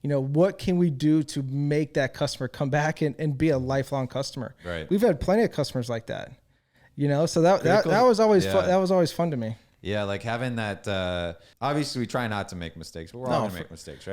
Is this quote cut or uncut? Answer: cut